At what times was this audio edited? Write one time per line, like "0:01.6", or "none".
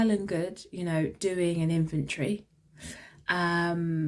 none

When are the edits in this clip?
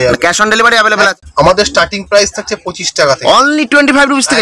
0:01.1

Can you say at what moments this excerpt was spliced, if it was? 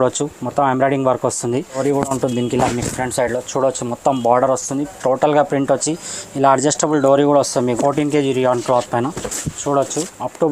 0:01.8
0:07.8

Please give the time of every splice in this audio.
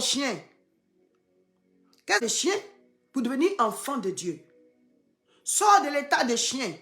0:02.2

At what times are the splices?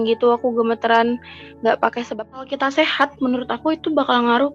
0:02.4

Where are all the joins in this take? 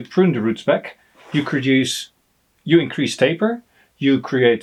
none

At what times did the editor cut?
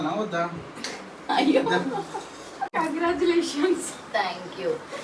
0:02.8

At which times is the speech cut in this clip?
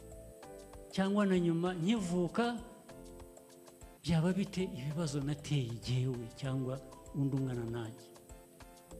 0:08.0

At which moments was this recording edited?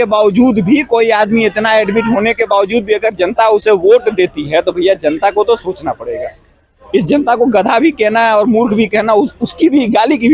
none

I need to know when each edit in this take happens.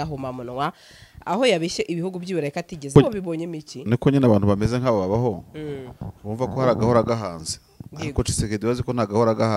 0:02.9

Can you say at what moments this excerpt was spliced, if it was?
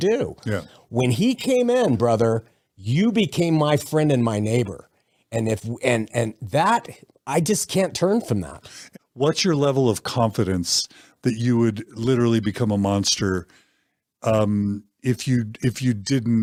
none

